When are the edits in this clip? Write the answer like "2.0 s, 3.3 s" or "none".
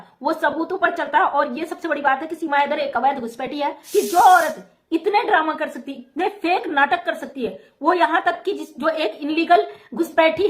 3.8 s